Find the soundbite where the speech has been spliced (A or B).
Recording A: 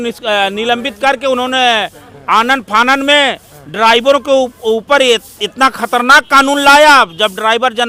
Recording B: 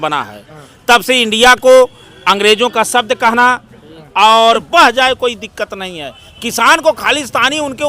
B